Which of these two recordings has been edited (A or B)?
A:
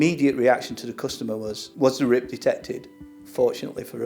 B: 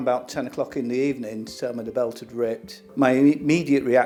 A